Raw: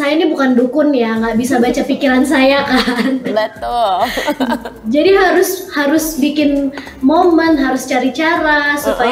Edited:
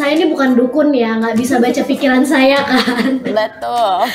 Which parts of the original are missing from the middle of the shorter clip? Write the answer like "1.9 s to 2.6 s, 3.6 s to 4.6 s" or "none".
none